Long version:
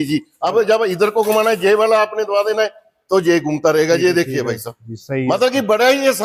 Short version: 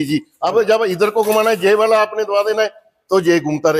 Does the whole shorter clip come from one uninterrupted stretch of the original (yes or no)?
yes